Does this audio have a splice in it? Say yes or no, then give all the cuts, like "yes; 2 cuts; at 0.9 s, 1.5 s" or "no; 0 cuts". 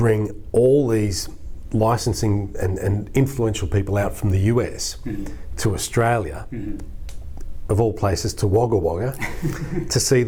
no; 0 cuts